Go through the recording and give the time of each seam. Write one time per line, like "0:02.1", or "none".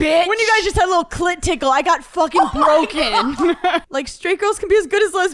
0:03.8